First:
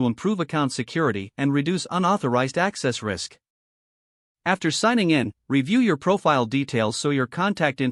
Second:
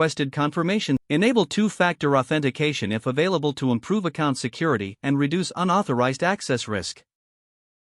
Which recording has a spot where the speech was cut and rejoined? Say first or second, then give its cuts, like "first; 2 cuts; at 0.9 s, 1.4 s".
second; 1 cut; at 1.0 s